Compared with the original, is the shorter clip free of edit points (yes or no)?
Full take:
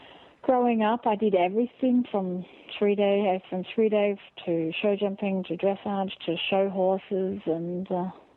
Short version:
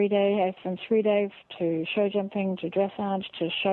yes